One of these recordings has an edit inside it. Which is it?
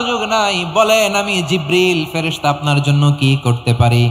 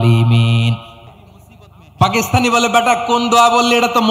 second; 1 cut; at 0.9 s

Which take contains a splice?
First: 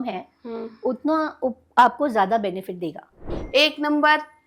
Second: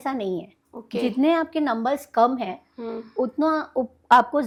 first; 1 cut; at 3.3 s

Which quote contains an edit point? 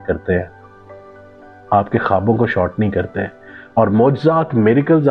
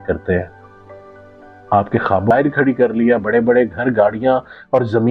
second; 1 cut; at 2.3 s

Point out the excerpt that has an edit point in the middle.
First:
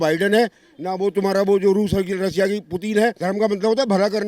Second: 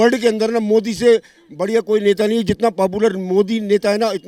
first; 1 cut; at 3.2 s

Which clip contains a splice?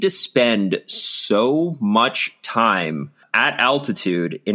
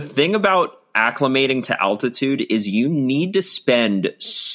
first; 1 cut; at 3.2 s

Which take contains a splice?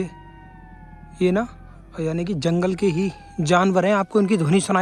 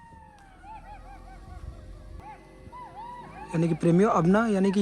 second; 1 cut; at 2.2 s

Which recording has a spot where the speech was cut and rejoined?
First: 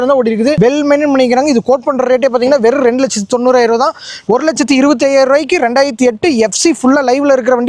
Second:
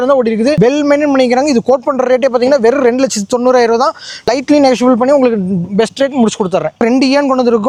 first; 1 cut; at 4.2 s

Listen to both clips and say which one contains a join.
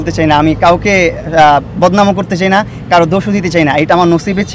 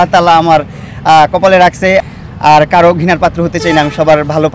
second; 1 cut; at 2.0 s

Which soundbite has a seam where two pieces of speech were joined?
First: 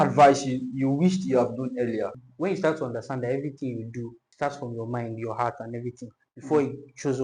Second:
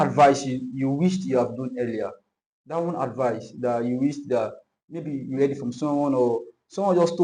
first; 2 cuts; at 2.2 s, 4.2 s

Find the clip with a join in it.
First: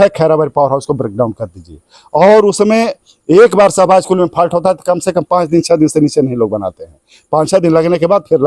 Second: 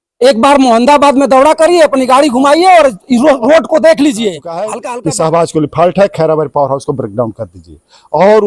second; 1 cut; at 4.7 s

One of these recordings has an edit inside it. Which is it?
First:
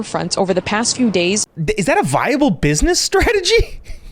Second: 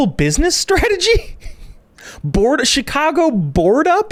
first; 1 cut; at 1.5 s

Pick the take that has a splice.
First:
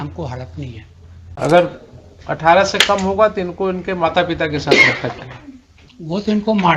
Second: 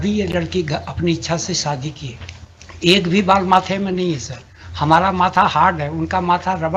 first; 1 cut; at 1.2 s

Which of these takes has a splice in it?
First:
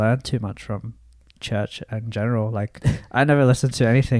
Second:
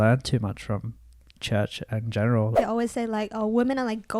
second; 1 cut; at 2.5 s

